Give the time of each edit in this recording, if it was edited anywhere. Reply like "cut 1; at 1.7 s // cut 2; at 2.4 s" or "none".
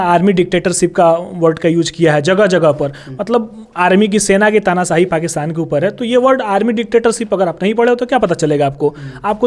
none